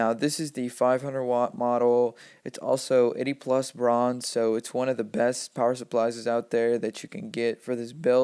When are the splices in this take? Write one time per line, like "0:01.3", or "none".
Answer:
0:01.1

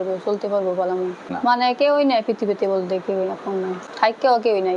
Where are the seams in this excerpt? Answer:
0:01.2
0:03.8

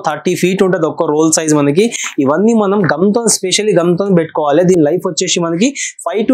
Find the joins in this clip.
none

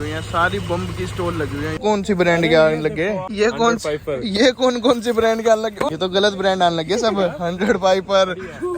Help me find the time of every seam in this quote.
0:01.8
0:03.3
0:05.9

